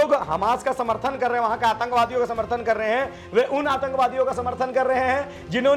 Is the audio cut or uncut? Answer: uncut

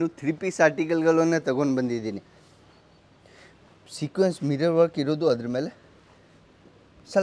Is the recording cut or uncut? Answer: uncut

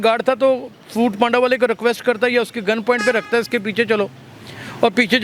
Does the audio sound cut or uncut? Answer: uncut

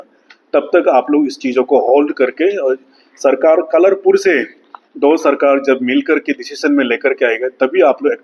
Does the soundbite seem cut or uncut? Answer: uncut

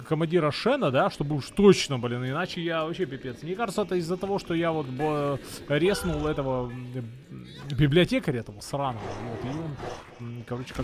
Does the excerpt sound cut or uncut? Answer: uncut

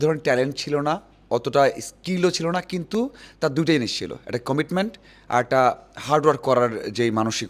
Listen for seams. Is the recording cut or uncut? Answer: uncut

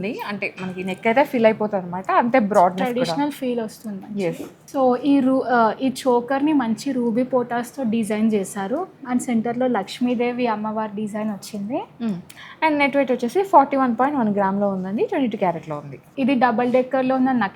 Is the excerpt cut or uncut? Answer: uncut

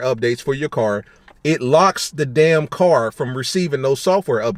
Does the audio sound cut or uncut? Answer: uncut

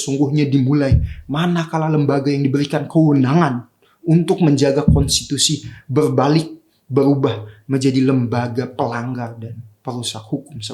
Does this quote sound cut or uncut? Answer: uncut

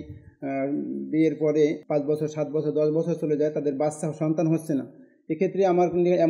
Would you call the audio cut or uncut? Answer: uncut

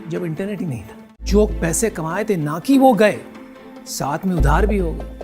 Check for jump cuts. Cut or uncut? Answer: cut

